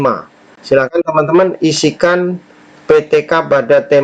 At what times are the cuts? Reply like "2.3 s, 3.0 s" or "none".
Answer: none